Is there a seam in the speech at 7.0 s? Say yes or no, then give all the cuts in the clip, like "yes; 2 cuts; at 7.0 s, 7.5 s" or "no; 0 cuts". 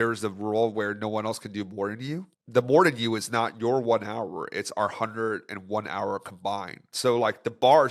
no; 0 cuts